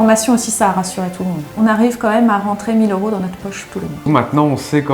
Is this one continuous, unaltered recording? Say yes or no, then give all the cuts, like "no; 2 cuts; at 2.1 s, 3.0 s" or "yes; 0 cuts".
no; 2 cuts; at 1.5 s, 4.0 s